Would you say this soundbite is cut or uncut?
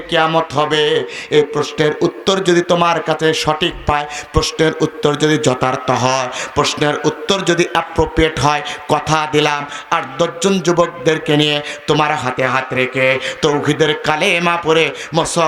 uncut